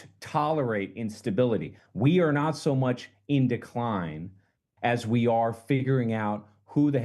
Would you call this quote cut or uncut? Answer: cut